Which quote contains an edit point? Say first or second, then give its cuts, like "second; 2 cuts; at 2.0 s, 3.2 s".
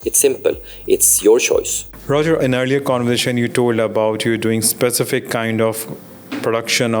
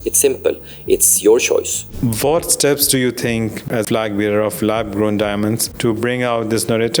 second; 3 cuts; at 1.9 s, 3.7 s, 5.7 s